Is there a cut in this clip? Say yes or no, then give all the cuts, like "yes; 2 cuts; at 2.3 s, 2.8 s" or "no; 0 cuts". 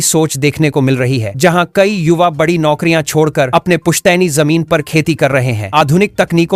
no; 0 cuts